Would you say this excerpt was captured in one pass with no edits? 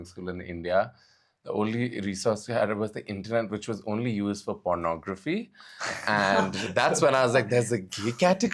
yes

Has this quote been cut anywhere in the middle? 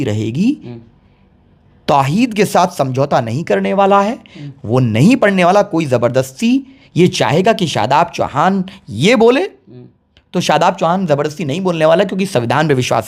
no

